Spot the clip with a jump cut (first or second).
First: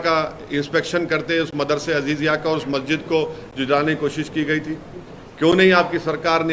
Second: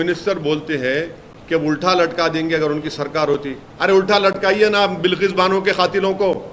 second